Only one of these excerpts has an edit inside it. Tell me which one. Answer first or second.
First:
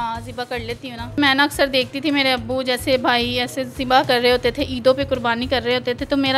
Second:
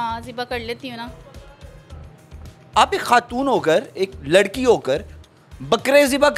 first